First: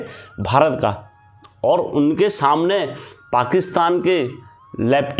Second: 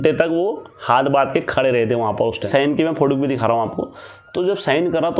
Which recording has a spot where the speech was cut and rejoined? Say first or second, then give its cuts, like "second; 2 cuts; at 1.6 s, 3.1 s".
second; 1 cut; at 2.5 s